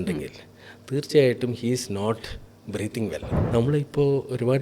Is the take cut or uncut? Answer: cut